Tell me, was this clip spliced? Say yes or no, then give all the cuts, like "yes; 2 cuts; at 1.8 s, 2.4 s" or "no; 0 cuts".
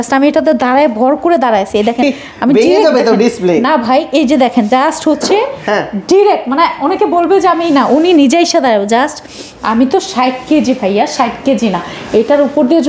no; 0 cuts